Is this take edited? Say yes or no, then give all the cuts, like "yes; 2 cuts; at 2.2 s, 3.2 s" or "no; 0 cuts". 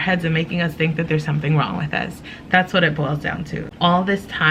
yes; 1 cut; at 3.6 s